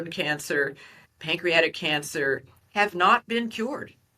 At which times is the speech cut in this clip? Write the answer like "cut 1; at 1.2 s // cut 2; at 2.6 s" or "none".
cut 1; at 2.5 s